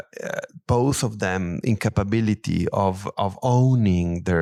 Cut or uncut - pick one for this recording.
uncut